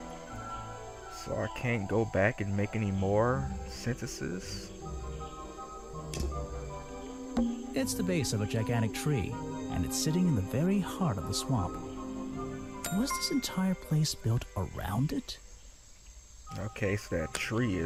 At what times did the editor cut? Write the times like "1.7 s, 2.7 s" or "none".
none